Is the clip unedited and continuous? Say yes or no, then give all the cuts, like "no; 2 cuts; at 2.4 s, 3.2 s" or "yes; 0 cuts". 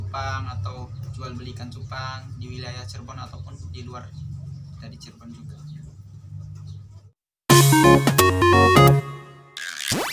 no; 1 cut; at 7.3 s